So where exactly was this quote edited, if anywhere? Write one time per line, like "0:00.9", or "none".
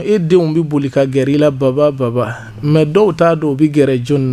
none